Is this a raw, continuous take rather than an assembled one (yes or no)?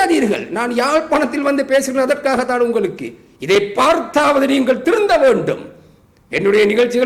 yes